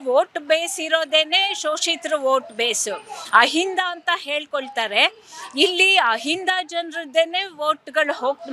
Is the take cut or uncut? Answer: uncut